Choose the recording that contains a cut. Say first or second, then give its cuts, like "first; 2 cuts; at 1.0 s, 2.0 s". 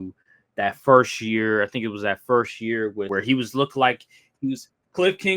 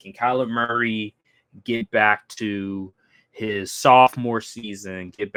first; 1 cut; at 3.1 s